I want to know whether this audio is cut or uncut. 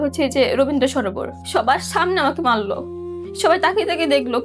cut